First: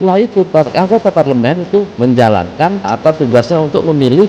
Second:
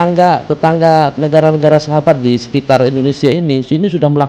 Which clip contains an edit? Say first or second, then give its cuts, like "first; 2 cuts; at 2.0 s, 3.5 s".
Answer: first; 2 cuts; at 1.9 s, 2.9 s